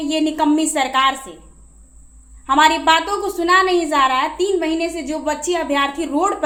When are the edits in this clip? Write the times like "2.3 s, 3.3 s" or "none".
none